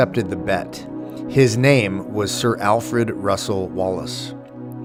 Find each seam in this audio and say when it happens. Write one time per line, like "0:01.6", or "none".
none